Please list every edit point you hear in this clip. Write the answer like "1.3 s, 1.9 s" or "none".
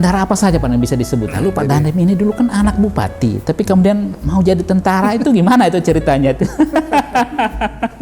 1.3 s